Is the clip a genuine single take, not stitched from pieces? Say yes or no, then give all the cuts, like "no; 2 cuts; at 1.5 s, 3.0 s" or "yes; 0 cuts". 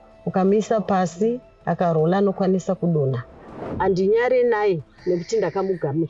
no; 1 cut; at 3.6 s